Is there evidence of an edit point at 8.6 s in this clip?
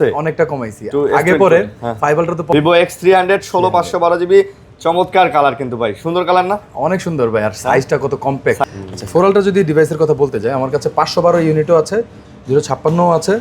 yes; 2 cuts; at 2.5 s, 8.6 s

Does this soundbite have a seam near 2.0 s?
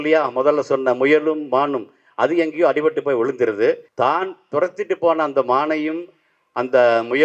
no; 1 cut; at 3.9 s

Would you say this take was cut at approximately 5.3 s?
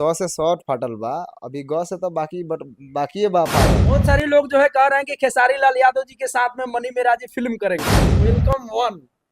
no; 2 cuts; at 3.8 s, 8.1 s

